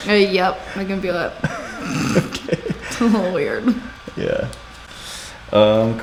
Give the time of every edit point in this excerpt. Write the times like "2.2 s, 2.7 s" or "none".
none